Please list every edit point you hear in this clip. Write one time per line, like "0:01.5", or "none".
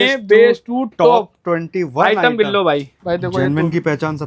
0:02.9